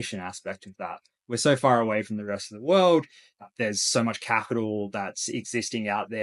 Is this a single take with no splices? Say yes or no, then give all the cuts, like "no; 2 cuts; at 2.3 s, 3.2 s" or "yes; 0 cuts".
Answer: yes; 0 cuts